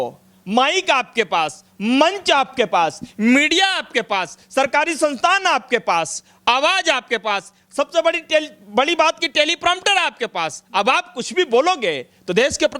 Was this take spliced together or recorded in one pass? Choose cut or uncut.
uncut